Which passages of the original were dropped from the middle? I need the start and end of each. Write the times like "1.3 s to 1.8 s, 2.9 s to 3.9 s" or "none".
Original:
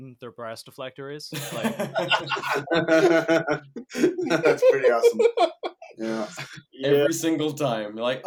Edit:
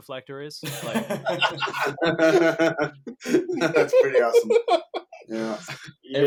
none